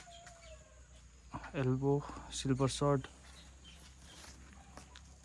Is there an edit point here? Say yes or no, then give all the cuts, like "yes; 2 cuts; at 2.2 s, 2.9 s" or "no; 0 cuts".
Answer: no; 0 cuts